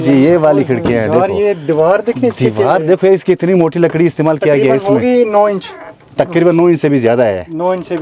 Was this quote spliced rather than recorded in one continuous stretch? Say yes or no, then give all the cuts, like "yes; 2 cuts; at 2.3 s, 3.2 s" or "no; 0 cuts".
no; 0 cuts